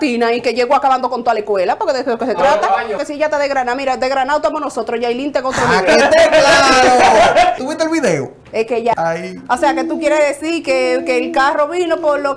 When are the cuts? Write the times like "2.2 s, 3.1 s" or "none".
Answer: 3.0 s, 7.6 s, 8.9 s